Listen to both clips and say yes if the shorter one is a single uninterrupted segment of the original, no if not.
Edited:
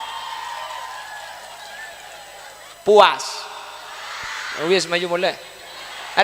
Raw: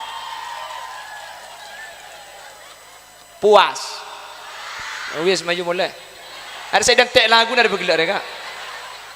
no